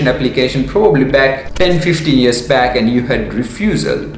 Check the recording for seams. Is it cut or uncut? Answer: cut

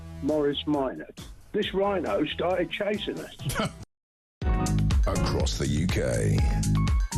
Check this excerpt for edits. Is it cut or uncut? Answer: uncut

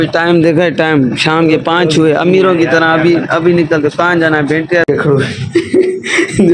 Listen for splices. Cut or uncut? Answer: cut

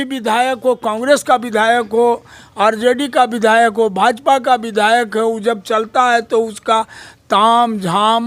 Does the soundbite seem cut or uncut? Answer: uncut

